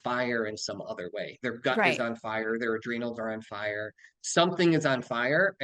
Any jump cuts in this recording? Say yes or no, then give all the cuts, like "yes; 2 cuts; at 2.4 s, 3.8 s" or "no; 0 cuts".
no; 0 cuts